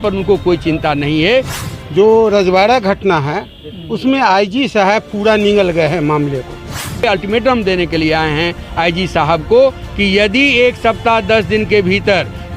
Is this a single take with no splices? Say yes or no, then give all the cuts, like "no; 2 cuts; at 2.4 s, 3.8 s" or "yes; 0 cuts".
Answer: no; 2 cuts; at 1.6 s, 7.0 s